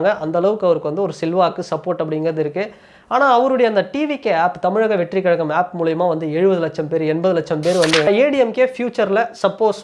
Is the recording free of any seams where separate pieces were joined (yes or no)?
no